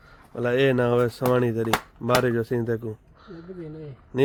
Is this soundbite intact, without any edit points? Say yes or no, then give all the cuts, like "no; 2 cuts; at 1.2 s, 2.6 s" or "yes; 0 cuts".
yes; 0 cuts